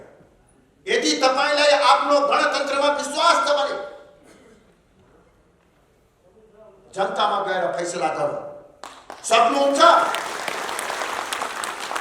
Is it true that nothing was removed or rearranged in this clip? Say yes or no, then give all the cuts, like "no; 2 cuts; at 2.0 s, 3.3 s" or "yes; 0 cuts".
no; 1 cut; at 11.1 s